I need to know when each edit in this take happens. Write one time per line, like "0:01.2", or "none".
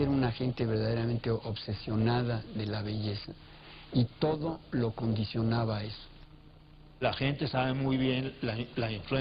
none

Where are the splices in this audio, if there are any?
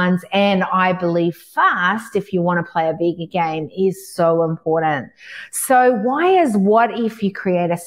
none

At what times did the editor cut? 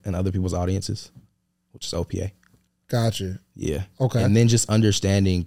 none

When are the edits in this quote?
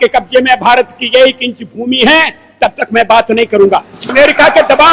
0:04.0

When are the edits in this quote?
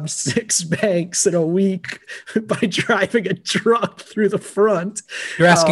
none

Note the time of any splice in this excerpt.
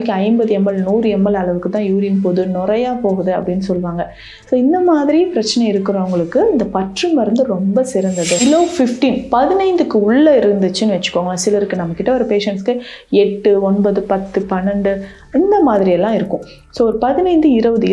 0:08.4

